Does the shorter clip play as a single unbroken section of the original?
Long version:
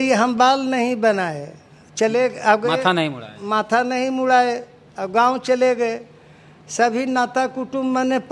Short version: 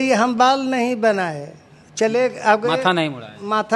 yes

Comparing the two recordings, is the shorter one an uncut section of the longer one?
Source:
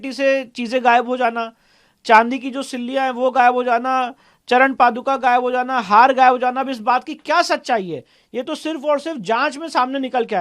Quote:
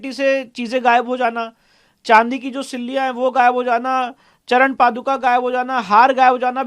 yes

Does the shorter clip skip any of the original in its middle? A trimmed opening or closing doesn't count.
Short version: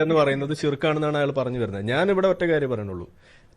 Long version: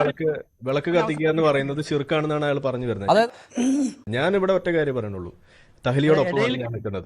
yes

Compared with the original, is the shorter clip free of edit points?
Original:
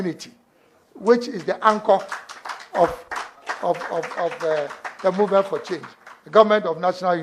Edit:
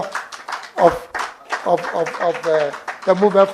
yes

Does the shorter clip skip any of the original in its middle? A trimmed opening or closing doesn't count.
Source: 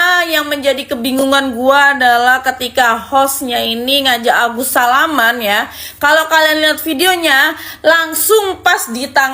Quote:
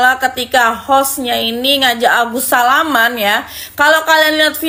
no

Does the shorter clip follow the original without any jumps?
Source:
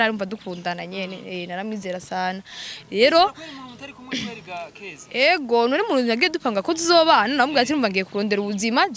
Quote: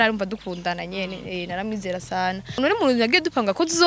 no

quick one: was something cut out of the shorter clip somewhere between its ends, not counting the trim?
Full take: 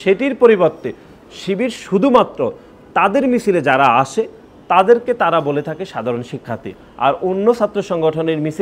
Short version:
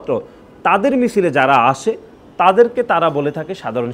no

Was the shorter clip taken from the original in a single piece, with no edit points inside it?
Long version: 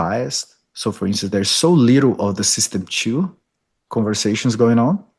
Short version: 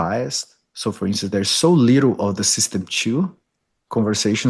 yes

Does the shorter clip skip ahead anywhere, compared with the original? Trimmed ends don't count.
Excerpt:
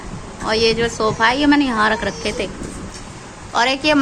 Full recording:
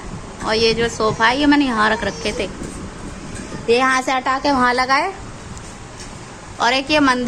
yes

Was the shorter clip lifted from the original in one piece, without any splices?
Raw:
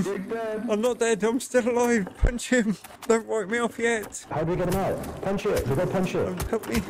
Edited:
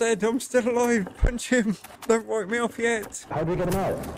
yes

